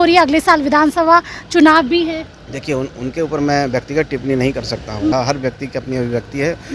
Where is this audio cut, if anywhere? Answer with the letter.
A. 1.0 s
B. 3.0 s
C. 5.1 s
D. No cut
C